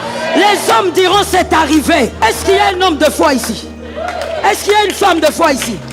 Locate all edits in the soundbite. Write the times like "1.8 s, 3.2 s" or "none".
2.1 s

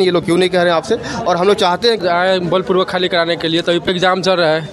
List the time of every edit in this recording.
2.0 s, 3.9 s

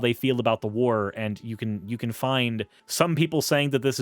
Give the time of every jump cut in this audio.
2.8 s

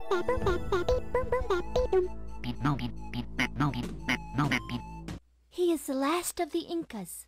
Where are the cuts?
5.0 s

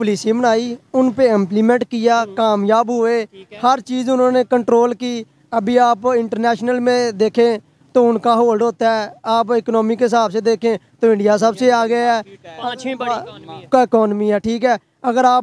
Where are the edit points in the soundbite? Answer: none

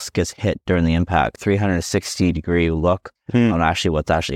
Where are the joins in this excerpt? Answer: 1.4 s

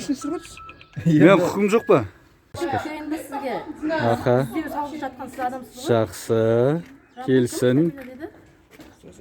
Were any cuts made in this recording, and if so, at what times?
2.5 s

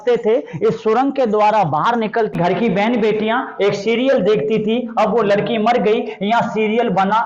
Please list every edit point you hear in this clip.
2.3 s

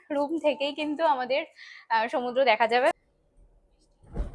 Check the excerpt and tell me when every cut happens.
2.9 s

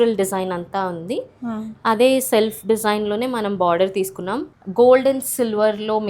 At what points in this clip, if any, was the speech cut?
4.5 s

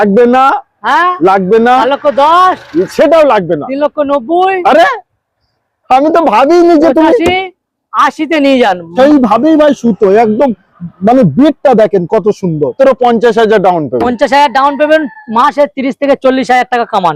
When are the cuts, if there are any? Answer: 8.9 s, 12.7 s

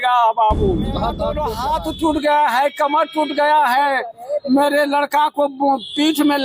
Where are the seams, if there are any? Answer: 1.3 s

